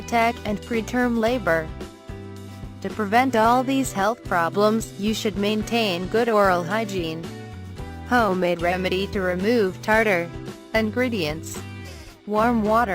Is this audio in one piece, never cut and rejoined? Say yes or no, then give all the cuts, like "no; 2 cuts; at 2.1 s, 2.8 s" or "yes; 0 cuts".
yes; 0 cuts